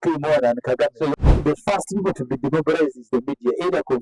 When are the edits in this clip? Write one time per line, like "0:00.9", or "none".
0:01.1